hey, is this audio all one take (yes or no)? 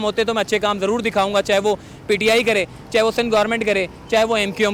yes